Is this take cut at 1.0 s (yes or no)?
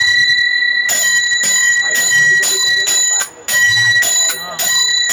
no